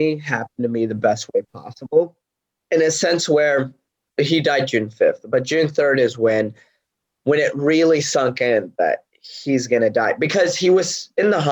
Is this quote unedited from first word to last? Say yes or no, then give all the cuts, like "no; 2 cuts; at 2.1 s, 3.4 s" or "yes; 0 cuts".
no; 1 cut; at 4.0 s